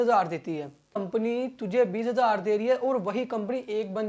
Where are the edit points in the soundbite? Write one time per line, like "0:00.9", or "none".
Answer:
0:01.0